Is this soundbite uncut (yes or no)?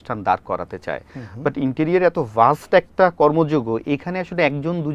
yes